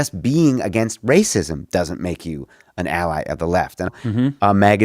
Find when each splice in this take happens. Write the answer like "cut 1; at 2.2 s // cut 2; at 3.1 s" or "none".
cut 1; at 3.9 s